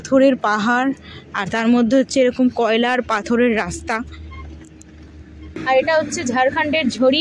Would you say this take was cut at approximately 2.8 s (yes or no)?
no